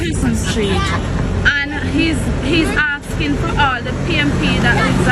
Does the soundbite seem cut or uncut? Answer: uncut